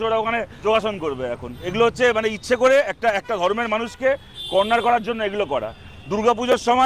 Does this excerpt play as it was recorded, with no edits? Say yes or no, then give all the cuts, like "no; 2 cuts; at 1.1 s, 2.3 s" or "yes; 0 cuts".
yes; 0 cuts